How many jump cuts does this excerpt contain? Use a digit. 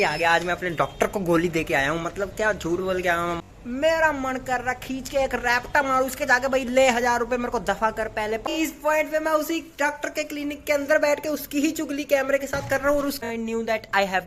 3